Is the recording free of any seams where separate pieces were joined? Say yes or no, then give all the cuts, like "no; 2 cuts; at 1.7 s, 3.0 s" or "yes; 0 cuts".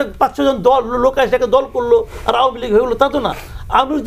yes; 0 cuts